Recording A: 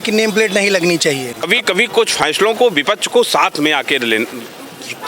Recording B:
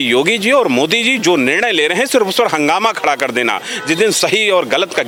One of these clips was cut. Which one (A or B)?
A